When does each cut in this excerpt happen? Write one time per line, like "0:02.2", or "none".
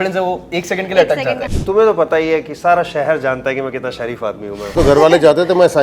0:01.5
0:04.7